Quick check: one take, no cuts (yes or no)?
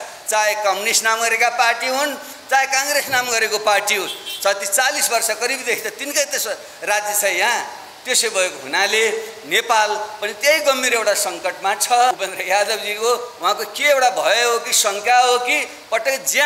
no